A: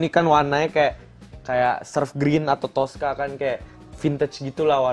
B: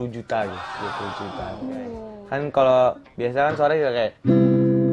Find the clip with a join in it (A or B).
B